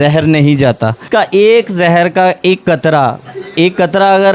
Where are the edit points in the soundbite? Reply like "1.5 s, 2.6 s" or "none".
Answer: 1.0 s